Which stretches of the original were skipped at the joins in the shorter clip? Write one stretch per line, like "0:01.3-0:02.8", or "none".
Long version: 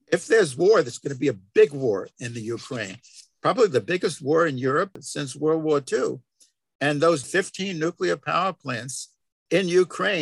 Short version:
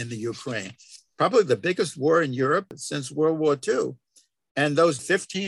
none